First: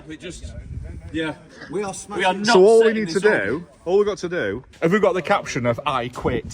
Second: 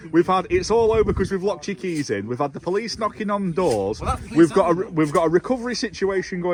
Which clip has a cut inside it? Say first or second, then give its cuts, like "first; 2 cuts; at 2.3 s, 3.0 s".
first; 1 cut; at 4.6 s